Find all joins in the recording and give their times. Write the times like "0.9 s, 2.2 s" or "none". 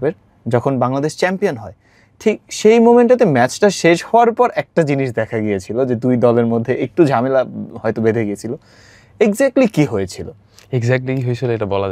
none